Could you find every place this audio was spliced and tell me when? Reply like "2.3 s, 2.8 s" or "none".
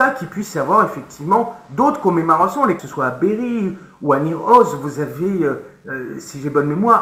2.9 s

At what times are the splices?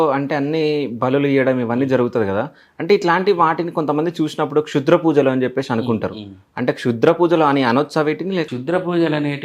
8.5 s

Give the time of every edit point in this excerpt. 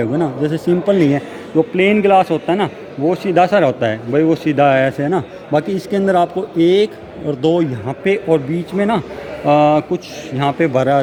none

